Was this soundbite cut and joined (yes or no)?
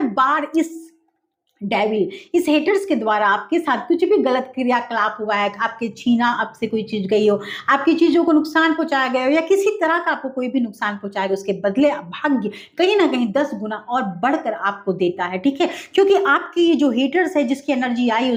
no